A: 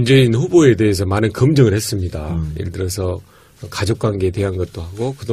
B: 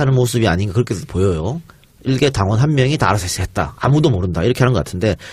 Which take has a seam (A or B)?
A